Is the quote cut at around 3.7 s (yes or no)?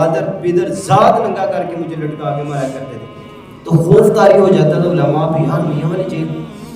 yes